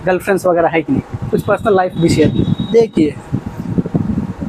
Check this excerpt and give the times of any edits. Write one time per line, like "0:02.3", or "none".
none

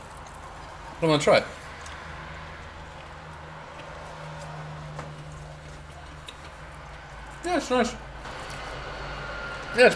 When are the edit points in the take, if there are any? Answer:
0:08.2

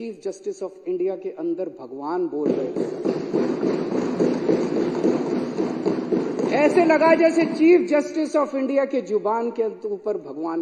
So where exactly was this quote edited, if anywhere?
none

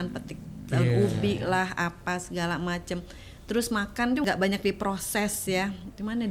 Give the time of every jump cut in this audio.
0:04.2

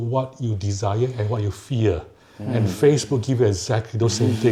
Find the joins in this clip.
none

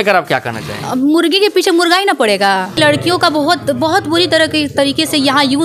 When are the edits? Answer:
0:02.7

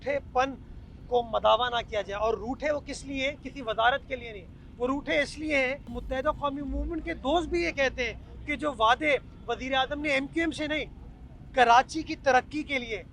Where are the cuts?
0:06.0

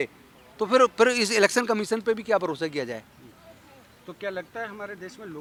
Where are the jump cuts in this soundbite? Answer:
none

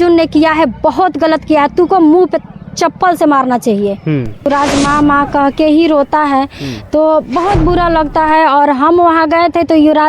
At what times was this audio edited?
0:04.5

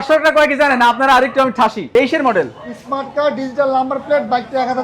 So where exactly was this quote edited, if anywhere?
0:01.8

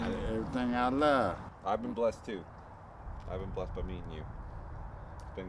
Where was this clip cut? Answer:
none

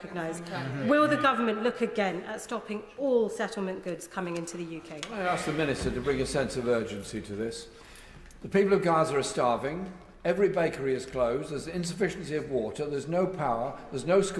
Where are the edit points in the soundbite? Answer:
0:05.1

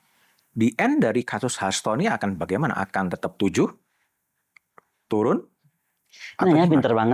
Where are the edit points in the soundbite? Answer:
none

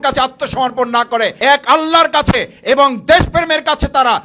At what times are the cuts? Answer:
0:01.4

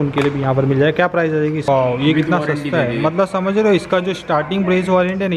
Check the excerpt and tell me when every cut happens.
0:01.7

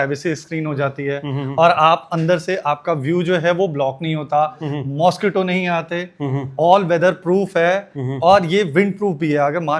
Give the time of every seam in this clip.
none

